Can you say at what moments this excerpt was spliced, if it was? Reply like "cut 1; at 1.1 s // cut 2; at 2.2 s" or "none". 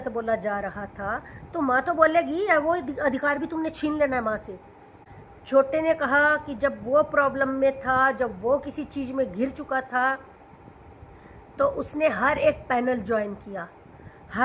cut 1; at 5.0 s